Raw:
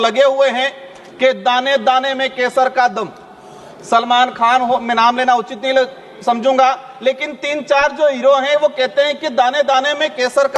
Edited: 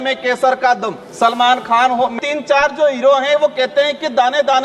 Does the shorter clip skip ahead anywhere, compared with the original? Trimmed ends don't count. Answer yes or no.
yes